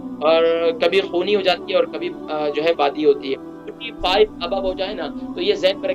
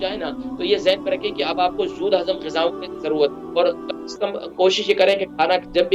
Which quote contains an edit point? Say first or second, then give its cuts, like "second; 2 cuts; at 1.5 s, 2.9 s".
first; 1 cut; at 3.5 s